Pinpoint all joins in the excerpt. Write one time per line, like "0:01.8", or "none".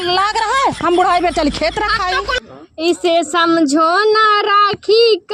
0:02.5